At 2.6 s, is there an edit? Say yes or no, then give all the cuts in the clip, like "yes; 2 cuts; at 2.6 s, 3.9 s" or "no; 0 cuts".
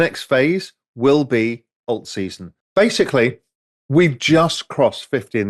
yes; 1 cut; at 2.6 s